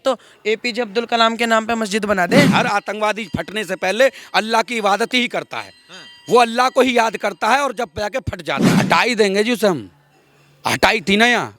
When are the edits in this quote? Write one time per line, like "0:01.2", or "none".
0:02.5
0:08.7